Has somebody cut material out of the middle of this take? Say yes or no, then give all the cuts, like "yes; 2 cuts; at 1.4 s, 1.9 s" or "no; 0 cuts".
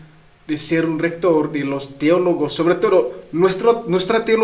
no; 0 cuts